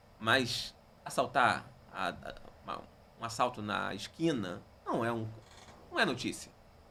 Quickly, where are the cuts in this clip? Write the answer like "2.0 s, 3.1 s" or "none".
none